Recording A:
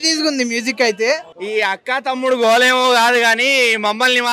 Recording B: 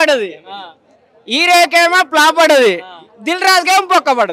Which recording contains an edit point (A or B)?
A